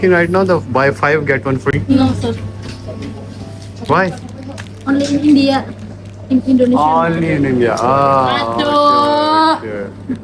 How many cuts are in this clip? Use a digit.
0